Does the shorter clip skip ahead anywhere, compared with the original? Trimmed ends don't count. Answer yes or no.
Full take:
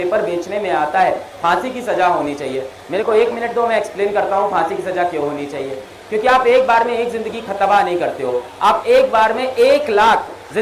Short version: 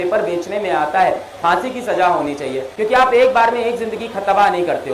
yes